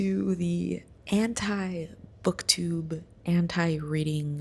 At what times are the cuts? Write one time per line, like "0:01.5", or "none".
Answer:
none